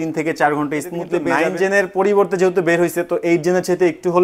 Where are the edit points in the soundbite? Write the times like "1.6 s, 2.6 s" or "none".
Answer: 1.3 s